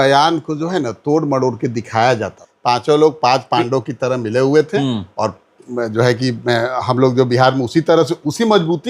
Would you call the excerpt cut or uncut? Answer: cut